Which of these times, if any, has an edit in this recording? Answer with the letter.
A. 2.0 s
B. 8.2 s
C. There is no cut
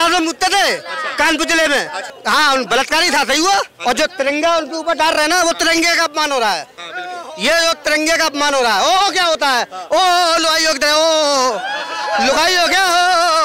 A